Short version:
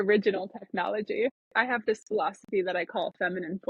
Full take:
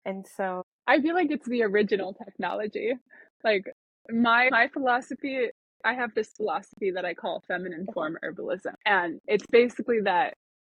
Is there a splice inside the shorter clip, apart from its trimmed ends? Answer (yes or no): yes